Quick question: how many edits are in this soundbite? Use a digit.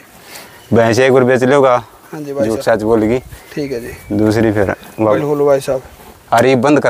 1